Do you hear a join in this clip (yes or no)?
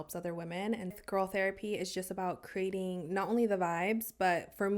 yes